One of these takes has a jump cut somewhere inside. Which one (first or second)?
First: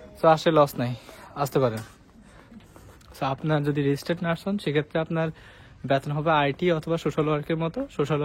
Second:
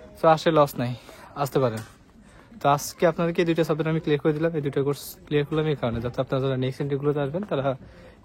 first